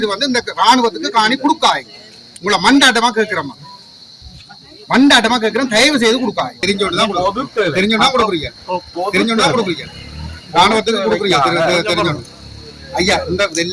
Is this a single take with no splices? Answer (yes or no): no